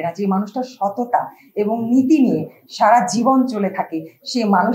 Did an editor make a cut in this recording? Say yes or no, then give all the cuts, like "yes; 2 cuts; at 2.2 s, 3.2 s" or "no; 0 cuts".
no; 0 cuts